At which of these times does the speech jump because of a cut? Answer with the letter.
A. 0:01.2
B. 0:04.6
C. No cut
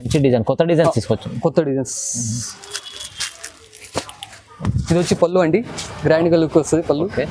B